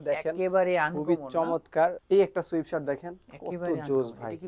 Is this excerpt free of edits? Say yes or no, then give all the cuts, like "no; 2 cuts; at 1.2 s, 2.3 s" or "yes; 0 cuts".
no; 1 cut; at 2.0 s